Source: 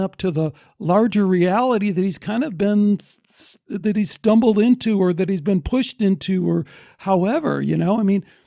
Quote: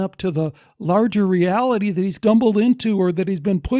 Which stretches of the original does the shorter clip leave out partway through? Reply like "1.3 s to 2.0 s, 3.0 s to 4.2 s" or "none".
2.1 s to 4.2 s